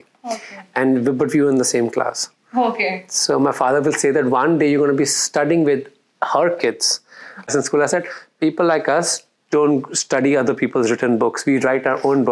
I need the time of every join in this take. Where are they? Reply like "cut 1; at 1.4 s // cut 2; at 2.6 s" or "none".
cut 1; at 7.5 s

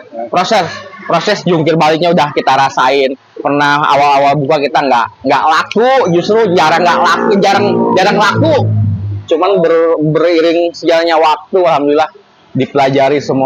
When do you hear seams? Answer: none

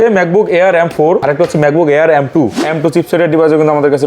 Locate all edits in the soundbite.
cut 1; at 1.2 s // cut 2; at 2.6 s

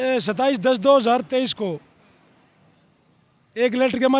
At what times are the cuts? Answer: none

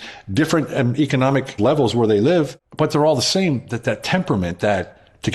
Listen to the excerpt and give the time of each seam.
cut 1; at 1.6 s // cut 2; at 2.6 s

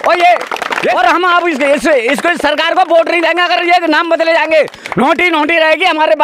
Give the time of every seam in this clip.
cut 1; at 1.0 s

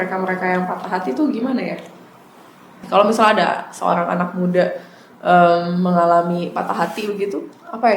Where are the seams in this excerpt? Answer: cut 1; at 2.9 s

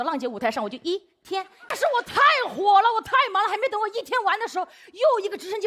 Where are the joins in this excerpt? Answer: cut 1; at 1.7 s

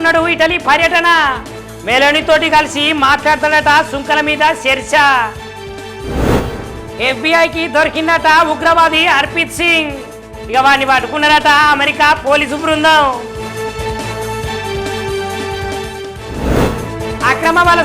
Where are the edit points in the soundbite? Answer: cut 1; at 6.0 s // cut 2; at 16.3 s

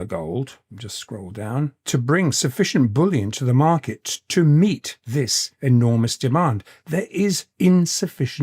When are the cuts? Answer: cut 1; at 5.2 s // cut 2; at 7.5 s

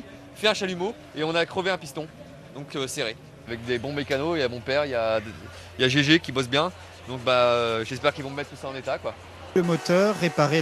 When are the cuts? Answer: cut 1; at 9.6 s

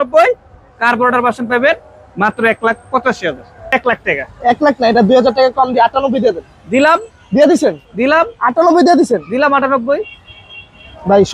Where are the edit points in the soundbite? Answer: cut 1; at 3.7 s

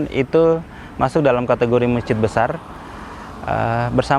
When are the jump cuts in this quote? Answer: none

